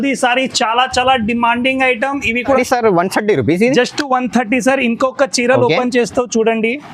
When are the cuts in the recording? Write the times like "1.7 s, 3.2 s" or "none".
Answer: 2.6 s